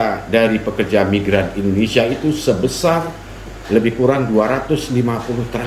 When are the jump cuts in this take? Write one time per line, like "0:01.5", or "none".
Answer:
none